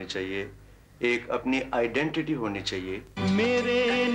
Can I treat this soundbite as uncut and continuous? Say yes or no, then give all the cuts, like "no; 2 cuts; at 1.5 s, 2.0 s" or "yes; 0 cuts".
no; 1 cut; at 3.1 s